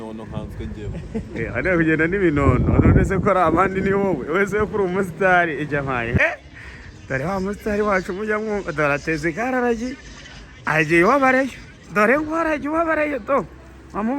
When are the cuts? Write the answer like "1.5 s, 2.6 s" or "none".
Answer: 6.2 s